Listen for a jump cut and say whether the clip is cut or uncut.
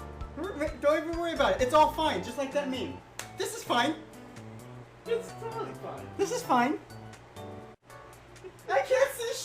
cut